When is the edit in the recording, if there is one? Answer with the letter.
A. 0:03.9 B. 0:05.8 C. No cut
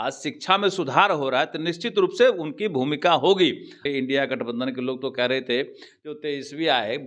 A